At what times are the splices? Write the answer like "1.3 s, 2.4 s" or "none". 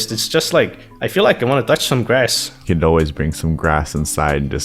2.6 s